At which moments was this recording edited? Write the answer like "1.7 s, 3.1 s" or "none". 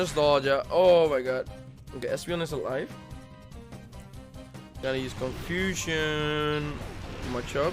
4.8 s